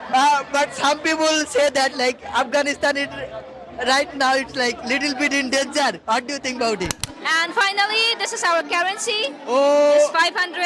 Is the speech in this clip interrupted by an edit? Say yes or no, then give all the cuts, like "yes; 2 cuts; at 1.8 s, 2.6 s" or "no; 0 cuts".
yes; 1 cut; at 7.1 s